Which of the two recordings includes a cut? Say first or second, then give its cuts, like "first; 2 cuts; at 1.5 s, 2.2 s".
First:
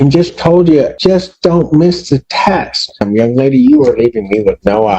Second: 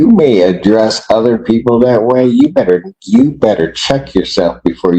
first; 2 cuts; at 0.9 s, 3.0 s